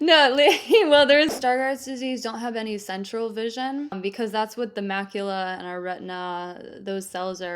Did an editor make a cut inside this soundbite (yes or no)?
yes